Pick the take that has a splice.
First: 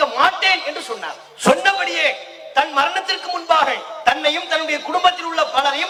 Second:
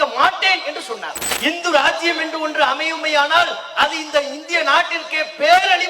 second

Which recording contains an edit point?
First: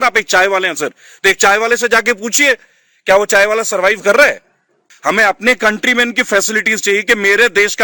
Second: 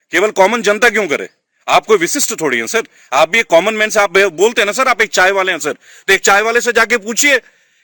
first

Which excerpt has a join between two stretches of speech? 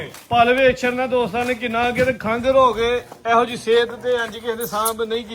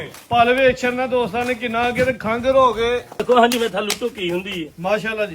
second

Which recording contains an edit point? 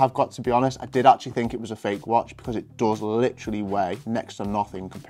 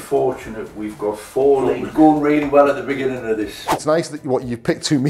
second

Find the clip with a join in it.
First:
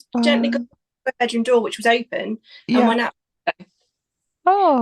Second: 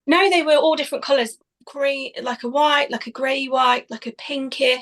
second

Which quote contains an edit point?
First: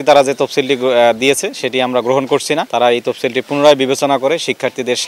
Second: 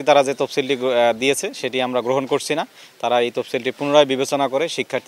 first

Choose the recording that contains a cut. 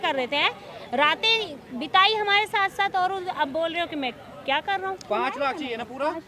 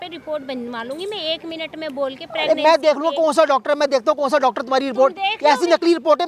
first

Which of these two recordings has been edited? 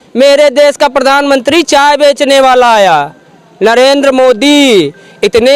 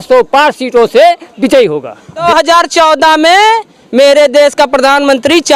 second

